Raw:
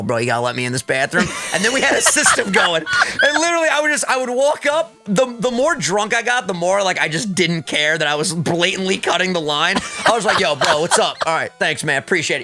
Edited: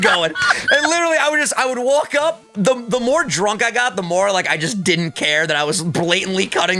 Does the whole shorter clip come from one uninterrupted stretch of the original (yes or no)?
yes